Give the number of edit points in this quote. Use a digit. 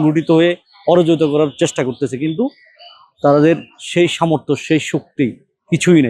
0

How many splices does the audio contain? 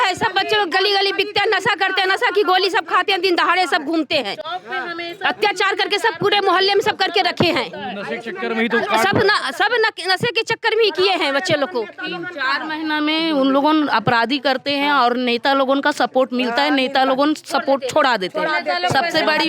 0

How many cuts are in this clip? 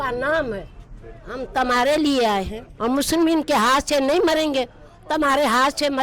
1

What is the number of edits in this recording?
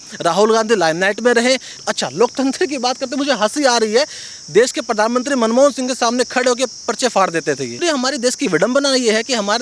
2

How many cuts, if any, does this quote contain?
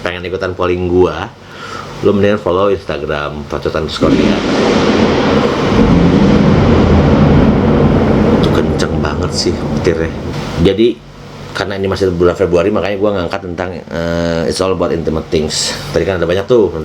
1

